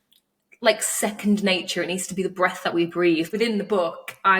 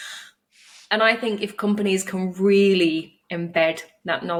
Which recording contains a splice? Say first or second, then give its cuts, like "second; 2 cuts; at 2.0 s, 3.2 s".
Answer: first; 1 cut; at 3.3 s